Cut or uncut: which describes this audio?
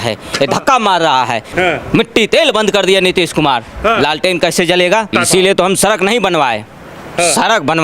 cut